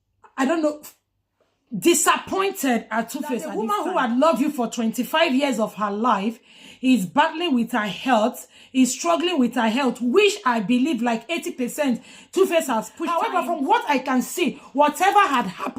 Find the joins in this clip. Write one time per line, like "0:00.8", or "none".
0:03.7
0:13.0